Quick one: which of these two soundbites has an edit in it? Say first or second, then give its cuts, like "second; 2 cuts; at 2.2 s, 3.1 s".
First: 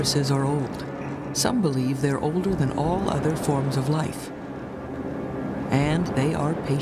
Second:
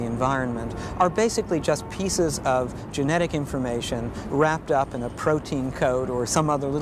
second; 1 cut; at 1.9 s